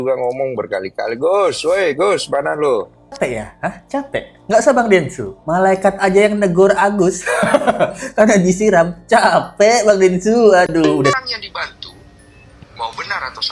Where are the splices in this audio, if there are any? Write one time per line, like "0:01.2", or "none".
0:03.1
0:11.1